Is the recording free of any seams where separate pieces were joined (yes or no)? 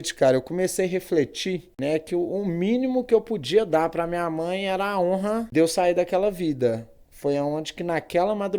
no